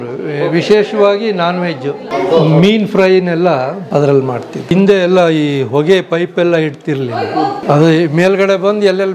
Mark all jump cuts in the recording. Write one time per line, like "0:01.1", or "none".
0:02.0
0:03.8
0:04.7
0:07.6